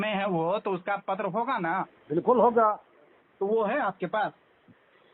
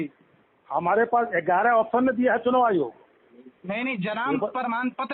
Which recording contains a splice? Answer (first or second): first